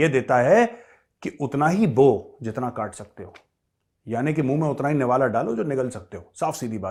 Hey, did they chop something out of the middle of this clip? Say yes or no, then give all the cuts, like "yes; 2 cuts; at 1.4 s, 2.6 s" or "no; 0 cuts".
no; 0 cuts